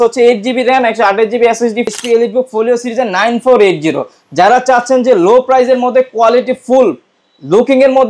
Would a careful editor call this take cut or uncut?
cut